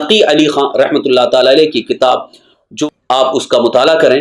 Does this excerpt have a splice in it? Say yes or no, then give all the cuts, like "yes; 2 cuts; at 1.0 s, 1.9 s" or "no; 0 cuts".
yes; 1 cut; at 2.7 s